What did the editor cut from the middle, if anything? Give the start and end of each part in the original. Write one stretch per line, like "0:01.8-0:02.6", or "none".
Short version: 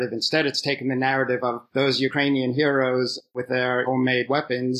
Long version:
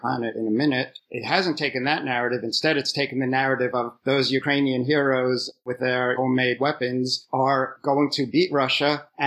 none